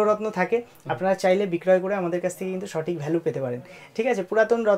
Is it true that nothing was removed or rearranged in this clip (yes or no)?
yes